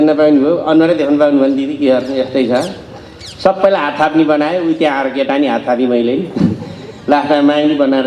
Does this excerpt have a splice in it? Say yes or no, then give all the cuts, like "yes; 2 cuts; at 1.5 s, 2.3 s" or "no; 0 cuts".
no; 0 cuts